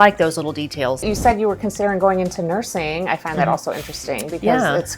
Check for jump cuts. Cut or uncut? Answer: cut